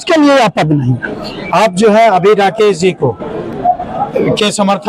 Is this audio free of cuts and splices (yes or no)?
yes